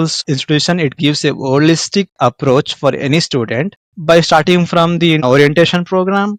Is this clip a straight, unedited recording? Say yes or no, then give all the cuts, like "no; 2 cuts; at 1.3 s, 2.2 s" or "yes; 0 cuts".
yes; 0 cuts